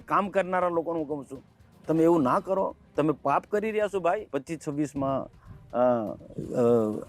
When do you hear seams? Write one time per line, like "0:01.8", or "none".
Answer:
0:04.3

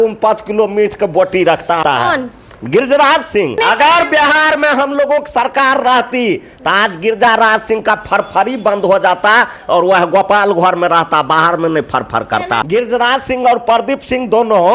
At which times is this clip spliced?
0:01.8
0:03.6
0:12.6

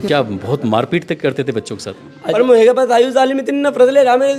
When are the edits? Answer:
0:02.3

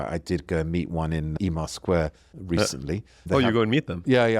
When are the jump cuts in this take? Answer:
0:01.4
0:02.6

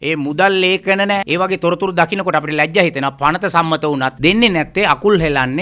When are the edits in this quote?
0:01.3
0:04.1

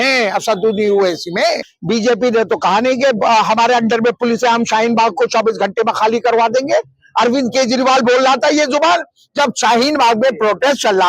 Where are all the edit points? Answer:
0:01.7

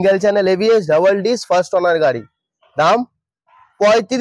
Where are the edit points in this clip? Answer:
none

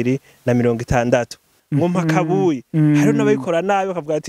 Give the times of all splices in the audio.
0:01.5

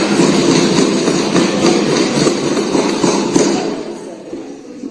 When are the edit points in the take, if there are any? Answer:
none

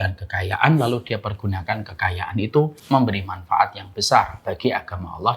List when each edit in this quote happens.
0:02.8

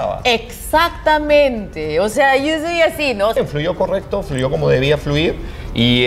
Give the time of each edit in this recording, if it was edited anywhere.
0:03.4

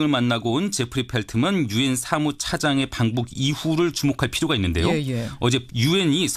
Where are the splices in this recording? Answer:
none

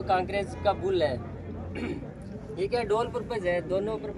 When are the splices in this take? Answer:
none

